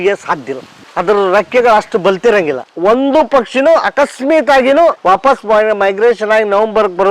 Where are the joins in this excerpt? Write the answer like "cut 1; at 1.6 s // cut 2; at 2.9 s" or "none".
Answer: cut 1; at 2.6 s // cut 2; at 5.0 s